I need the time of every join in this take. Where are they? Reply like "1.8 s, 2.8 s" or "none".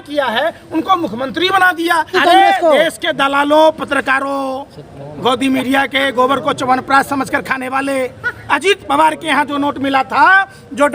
2.1 s